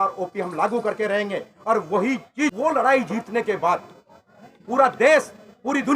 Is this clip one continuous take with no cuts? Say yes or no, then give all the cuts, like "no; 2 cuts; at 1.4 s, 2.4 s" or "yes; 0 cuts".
no; 1 cut; at 2.5 s